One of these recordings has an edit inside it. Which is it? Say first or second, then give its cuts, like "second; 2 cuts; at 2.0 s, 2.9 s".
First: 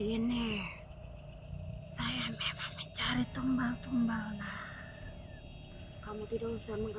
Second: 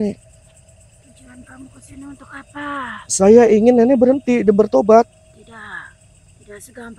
first; 1 cut; at 5.9 s